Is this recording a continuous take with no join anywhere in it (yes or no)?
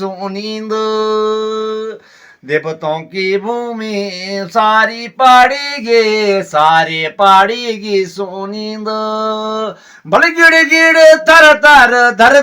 yes